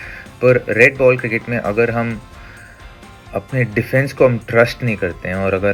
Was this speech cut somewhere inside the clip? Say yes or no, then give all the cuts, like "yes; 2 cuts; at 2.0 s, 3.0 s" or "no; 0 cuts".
no; 0 cuts